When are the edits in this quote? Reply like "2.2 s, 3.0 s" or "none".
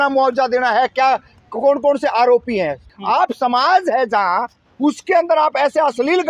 2.9 s